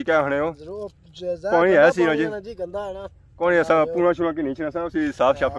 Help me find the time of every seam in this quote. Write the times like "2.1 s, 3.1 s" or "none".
none